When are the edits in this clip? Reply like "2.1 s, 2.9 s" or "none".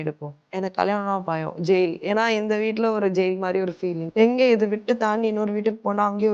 4.0 s